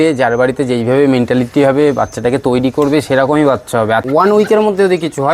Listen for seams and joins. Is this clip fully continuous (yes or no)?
no